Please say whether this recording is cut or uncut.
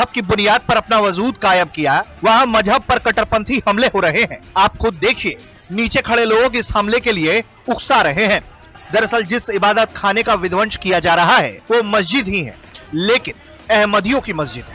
uncut